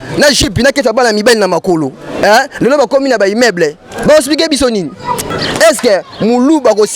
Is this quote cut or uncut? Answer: cut